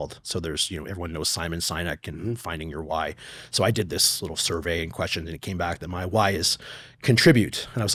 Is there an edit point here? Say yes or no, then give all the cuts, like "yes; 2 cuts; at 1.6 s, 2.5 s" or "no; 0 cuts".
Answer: no; 0 cuts